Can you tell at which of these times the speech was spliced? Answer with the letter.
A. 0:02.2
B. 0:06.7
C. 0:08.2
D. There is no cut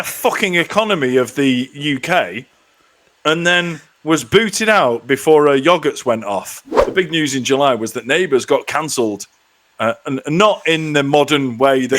B